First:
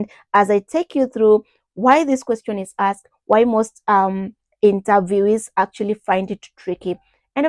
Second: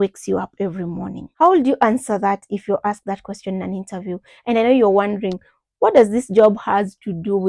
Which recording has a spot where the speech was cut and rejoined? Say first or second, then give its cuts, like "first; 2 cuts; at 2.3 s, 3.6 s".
second; 1 cut; at 1.2 s